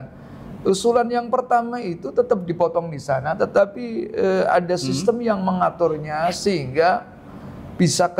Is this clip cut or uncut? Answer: uncut